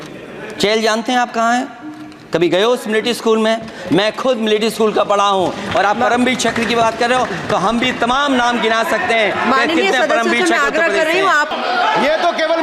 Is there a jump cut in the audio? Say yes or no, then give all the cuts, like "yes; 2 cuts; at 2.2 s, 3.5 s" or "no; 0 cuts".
yes; 1 cut; at 11.5 s